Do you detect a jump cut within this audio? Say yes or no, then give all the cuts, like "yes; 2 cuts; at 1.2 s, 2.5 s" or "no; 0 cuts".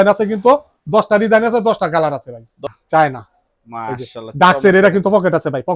yes; 1 cut; at 2.6 s